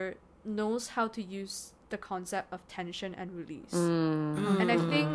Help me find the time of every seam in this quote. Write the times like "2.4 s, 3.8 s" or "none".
none

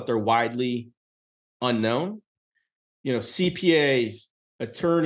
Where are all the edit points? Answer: 2.5 s

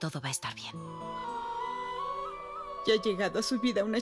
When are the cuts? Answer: 1.0 s

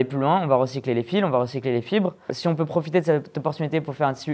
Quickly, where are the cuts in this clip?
2.3 s

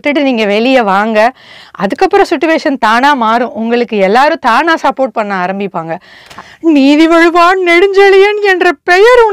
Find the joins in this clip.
6.3 s

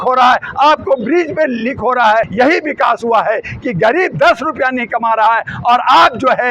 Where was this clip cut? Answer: 2.3 s

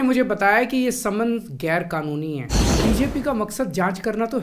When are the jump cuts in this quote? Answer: 2.6 s

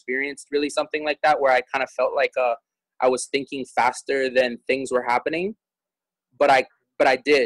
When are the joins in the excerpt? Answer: none

